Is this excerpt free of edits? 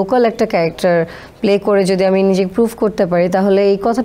yes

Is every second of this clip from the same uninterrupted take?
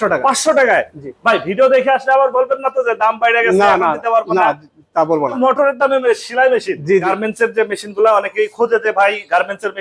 no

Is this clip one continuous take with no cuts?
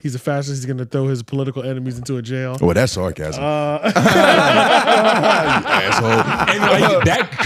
yes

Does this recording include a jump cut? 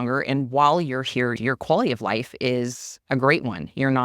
yes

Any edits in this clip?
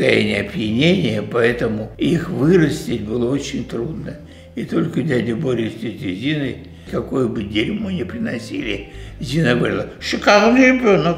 no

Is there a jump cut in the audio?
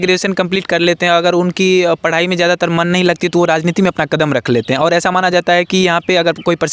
no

